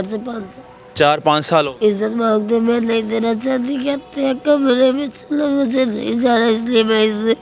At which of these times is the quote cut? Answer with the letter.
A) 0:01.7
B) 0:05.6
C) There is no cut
A